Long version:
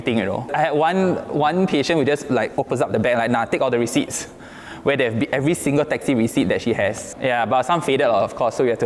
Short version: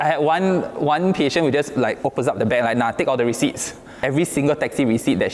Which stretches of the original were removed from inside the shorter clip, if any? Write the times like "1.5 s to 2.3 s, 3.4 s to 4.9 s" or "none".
4.5 s to 5.3 s